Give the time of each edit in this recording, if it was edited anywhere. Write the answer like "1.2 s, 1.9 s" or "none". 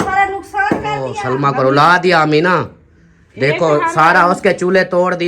1.2 s